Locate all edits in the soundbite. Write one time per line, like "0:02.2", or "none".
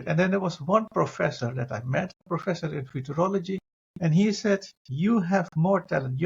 0:02.2